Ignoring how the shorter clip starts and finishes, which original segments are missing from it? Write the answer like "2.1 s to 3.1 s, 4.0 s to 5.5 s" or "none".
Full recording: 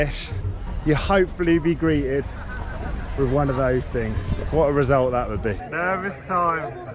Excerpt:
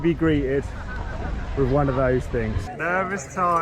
4.3 s to 5.6 s